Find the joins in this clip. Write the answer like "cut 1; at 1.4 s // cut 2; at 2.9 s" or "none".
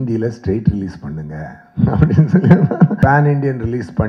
cut 1; at 3.0 s